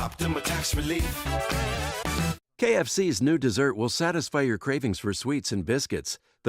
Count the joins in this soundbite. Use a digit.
1